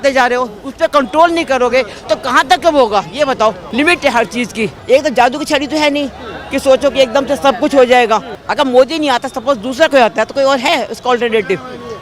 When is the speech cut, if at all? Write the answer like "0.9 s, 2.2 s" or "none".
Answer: 3.6 s, 4.8 s, 8.4 s

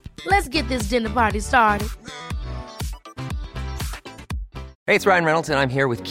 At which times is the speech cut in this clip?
4.6 s

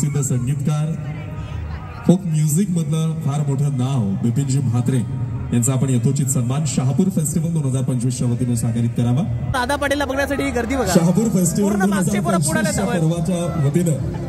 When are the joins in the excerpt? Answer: 9.5 s

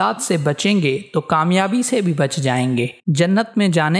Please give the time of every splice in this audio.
none

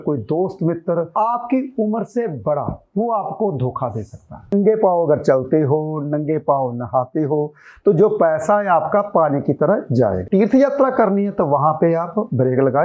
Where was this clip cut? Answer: 4.5 s, 10.2 s

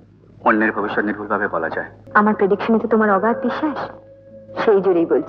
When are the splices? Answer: 2.0 s

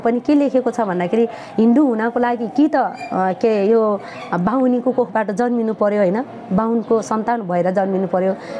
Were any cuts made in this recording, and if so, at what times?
none

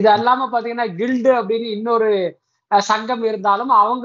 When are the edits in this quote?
none

